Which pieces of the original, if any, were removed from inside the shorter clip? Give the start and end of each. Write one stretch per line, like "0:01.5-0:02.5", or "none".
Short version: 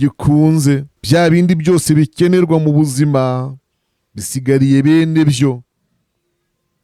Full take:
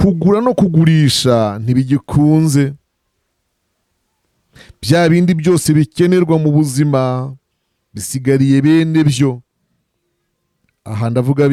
0:02.8-0:04.7

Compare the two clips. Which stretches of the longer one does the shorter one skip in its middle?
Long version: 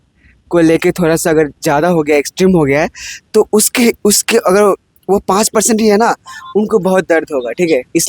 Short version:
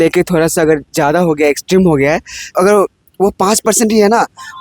0:03.2-0:04.4

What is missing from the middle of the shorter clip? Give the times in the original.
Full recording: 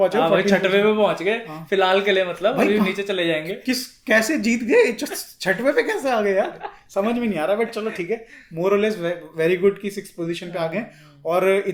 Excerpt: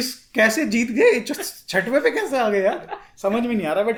none

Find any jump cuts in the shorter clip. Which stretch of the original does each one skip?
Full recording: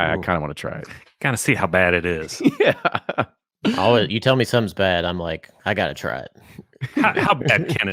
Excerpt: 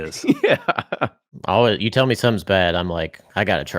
0:03.6-0:03.7

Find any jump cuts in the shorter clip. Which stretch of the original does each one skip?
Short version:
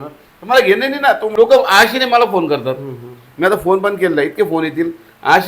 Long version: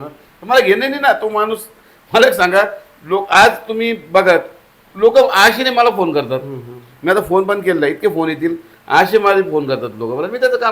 0:01.3-0:04.9

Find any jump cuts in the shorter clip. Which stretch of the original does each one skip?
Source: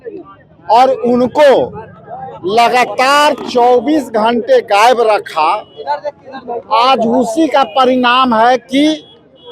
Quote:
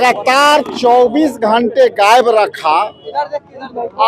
none

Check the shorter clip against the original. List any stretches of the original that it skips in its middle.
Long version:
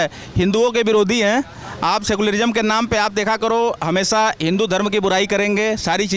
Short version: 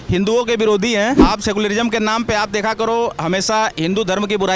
0:01.5-0:01.8

